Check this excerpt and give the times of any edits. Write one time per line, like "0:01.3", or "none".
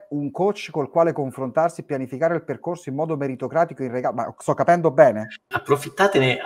0:05.5